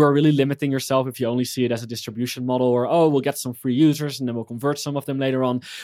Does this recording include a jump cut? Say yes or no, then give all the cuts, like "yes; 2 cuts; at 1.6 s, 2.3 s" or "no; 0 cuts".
no; 0 cuts